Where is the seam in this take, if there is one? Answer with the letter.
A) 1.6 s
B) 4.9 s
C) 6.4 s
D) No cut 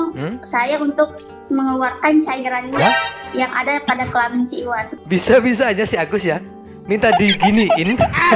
B